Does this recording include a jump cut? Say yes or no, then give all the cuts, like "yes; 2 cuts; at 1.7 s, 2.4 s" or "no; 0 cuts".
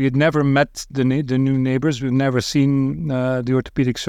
no; 0 cuts